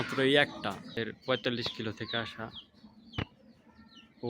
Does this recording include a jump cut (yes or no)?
yes